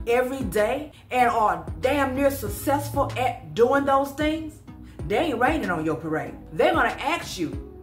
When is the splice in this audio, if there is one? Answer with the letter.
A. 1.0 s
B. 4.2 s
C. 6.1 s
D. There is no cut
A